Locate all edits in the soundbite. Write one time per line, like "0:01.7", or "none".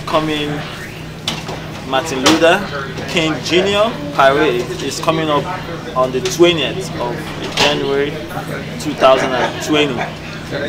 none